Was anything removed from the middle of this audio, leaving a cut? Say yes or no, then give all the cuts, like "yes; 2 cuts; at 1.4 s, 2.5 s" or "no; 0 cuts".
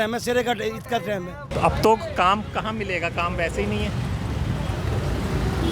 yes; 1 cut; at 1.4 s